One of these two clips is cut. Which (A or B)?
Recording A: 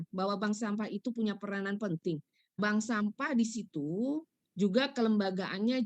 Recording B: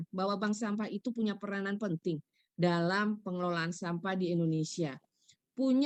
A